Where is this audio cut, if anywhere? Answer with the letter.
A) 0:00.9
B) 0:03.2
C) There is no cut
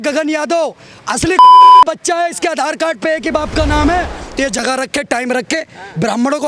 C